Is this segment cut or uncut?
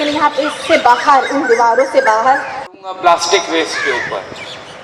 cut